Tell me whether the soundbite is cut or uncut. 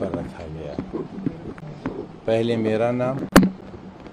uncut